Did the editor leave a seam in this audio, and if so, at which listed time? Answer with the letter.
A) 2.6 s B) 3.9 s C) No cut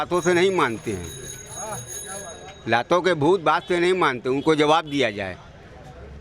C